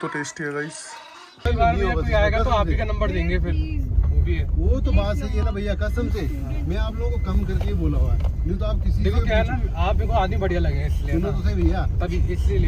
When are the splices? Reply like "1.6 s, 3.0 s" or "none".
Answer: 1.4 s